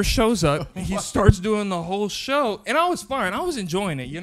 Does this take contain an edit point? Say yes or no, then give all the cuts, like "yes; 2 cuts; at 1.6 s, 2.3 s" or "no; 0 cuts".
no; 0 cuts